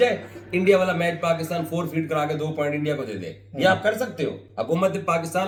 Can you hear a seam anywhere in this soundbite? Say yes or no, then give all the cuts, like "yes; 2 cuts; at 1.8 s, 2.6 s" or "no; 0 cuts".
no; 0 cuts